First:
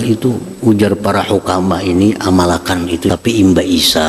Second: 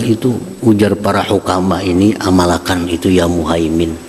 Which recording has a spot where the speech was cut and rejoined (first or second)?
first